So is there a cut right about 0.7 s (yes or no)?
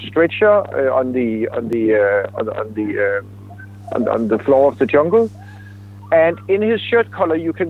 no